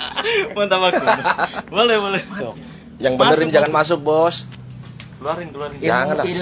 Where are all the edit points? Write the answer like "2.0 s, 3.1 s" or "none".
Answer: none